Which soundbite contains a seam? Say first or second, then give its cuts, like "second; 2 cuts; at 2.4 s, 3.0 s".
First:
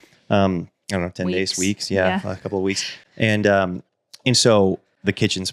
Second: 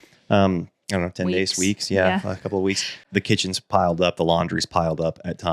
second; 1 cut; at 3.0 s